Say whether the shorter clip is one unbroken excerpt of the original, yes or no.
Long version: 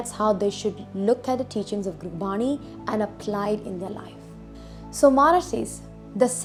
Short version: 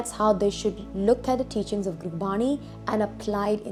yes